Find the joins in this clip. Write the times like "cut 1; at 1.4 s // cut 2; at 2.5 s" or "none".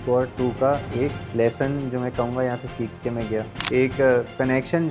cut 1; at 1.2 s // cut 2; at 3.6 s